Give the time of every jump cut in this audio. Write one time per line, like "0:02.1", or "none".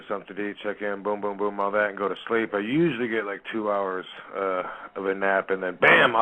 0:01.7